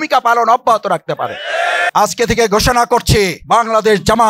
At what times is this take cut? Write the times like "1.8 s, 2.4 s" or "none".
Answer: 1.9 s, 3.4 s